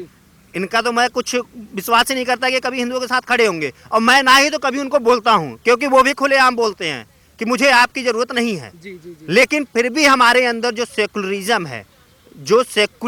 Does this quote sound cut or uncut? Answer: uncut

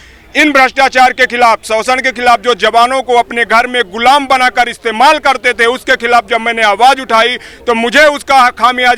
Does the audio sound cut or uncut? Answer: uncut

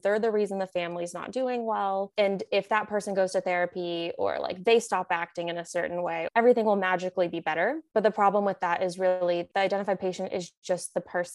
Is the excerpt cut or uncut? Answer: cut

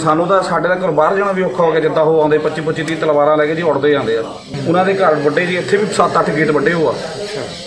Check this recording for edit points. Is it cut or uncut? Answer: cut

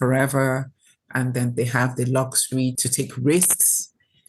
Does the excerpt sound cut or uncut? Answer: cut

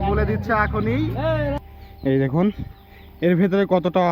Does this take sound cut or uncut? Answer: cut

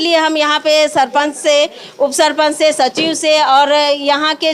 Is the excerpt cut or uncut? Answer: uncut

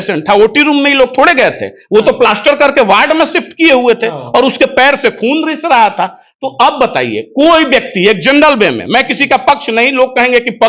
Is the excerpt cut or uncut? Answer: uncut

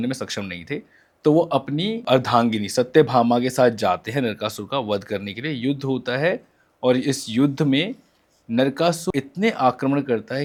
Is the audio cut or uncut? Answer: uncut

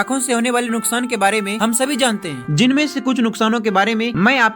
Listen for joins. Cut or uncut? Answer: uncut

